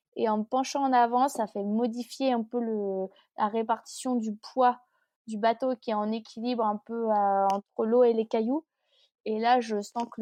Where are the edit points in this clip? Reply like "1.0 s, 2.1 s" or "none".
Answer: none